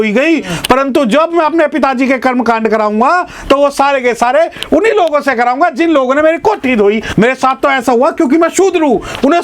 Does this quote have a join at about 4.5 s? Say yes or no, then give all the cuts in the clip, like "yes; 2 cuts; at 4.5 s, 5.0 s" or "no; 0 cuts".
no; 1 cut; at 7.1 s